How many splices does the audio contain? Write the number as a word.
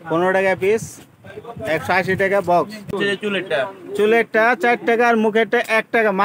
one